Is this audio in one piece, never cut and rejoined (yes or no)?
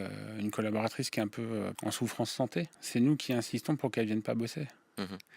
no